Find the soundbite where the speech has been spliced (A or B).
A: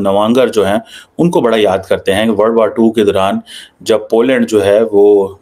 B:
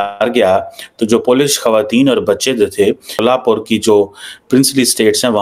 B